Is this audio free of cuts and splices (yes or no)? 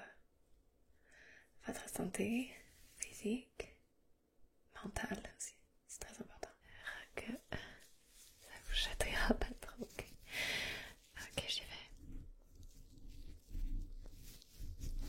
no